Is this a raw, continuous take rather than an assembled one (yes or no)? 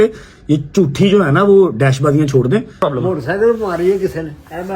no